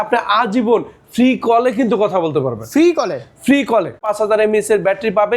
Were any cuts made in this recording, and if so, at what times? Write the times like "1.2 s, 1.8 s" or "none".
4.0 s